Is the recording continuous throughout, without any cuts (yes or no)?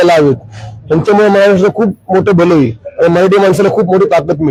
yes